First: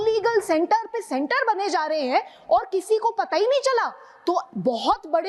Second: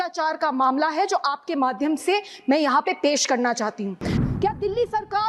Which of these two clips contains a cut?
second; 1 cut; at 4.2 s

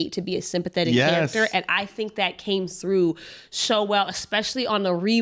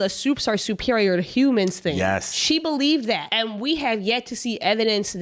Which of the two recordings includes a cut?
second; 1 cut; at 3.3 s

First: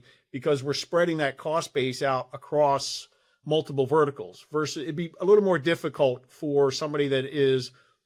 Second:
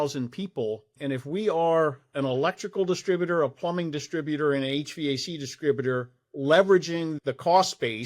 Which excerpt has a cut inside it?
second; 2 cuts; at 0.9 s, 7.1 s

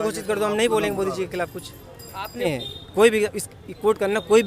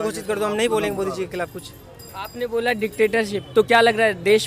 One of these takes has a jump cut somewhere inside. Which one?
first; 1 cut; at 2.4 s

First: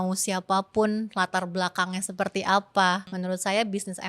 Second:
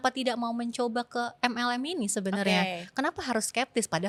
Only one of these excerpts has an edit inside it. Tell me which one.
first; 1 cut; at 3.1 s

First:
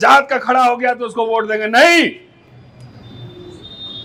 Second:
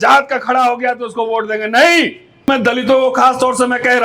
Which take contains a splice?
second; 1 cut; at 2.5 s

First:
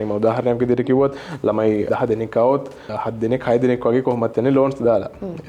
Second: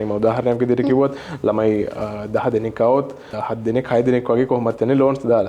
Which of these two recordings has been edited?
first; 1 cut; at 1.9 s

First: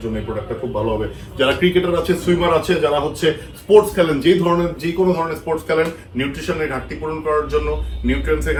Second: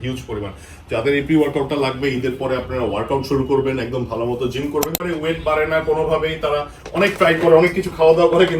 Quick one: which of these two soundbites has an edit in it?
second; 1 cut; at 5.0 s

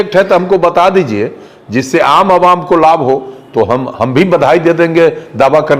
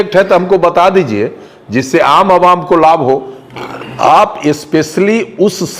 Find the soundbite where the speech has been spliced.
second; 1 cut; at 3.4 s

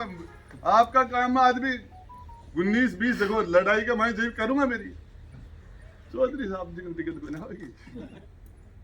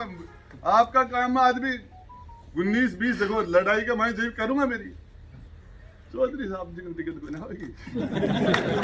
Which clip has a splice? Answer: first; 1 cut; at 7.8 s

